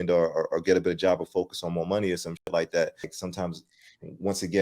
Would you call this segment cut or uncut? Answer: cut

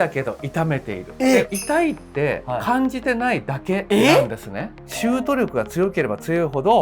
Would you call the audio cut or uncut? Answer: cut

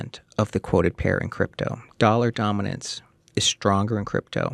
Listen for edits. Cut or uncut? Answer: uncut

